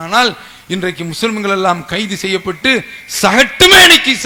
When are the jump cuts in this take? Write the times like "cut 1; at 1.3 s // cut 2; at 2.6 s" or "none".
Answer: none